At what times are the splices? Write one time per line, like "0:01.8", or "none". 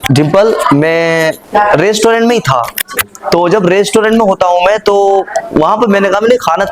0:01.4